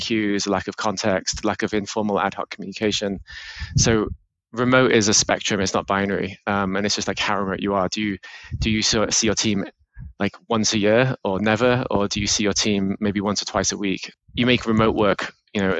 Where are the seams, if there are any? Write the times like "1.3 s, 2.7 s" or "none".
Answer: 14.1 s